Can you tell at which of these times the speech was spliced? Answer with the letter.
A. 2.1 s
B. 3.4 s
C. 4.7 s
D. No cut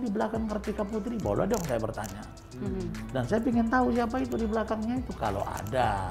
D